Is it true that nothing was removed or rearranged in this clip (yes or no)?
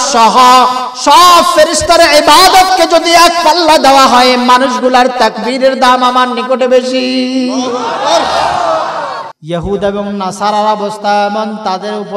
no